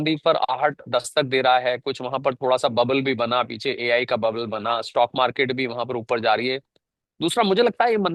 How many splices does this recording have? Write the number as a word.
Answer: zero